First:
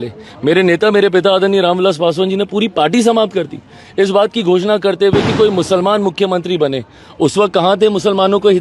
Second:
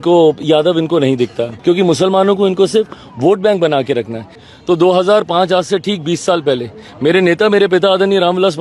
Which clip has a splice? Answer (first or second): second